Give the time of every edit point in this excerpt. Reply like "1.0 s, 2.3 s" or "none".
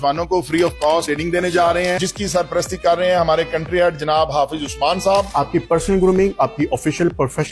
2.0 s, 5.3 s